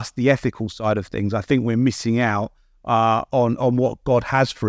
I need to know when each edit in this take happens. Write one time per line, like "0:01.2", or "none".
none